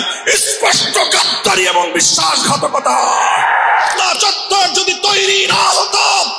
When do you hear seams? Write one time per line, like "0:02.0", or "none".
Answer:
0:03.9